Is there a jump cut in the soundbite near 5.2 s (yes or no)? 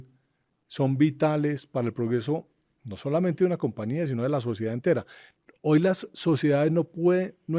no